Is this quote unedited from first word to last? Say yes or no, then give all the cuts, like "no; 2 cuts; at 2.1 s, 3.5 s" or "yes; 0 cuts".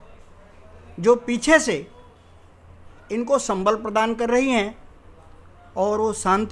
yes; 0 cuts